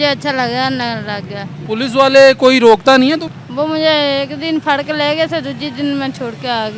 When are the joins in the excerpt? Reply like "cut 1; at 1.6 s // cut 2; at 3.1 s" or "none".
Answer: cut 1; at 1.6 s // cut 2; at 3.4 s

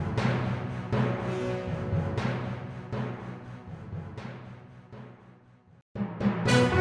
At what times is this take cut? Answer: cut 1; at 5.6 s

